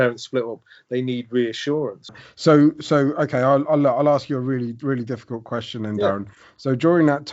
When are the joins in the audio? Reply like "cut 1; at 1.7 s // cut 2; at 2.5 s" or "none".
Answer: cut 1; at 2.2 s